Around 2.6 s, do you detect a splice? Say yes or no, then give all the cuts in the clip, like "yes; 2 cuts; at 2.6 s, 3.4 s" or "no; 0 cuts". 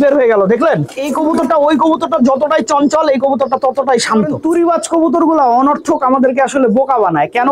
no; 2 cuts; at 1.0 s, 4.5 s